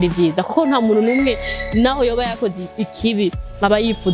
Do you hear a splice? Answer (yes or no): no